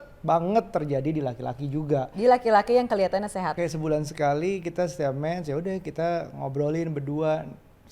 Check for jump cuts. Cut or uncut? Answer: cut